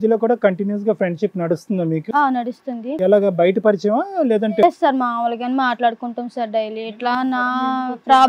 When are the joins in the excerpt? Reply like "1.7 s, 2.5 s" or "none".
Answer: none